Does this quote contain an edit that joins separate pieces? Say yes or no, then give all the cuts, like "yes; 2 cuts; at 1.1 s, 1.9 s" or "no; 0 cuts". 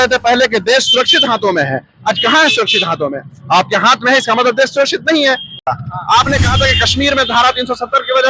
yes; 1 cut; at 5.6 s